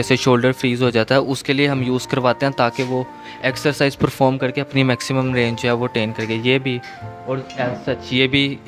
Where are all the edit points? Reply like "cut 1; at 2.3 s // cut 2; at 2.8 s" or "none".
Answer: none